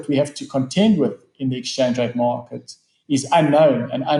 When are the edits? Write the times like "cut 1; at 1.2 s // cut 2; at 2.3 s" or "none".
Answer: none